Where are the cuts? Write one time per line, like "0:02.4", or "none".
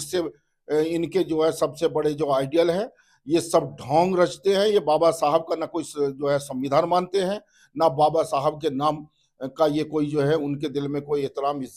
none